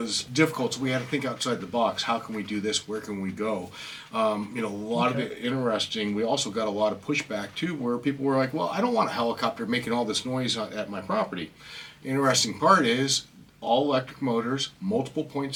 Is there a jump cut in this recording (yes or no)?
no